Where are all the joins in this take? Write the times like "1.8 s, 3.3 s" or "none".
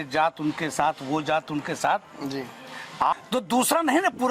3.1 s